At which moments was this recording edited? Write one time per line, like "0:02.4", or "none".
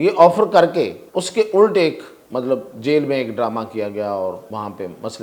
0:01.0
0:02.1
0:04.4